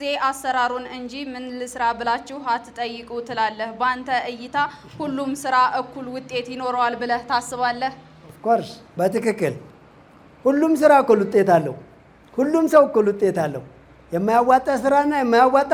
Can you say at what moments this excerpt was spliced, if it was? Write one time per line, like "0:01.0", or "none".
none